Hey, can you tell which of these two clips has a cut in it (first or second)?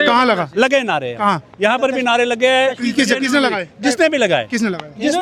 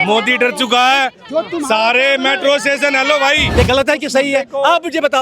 second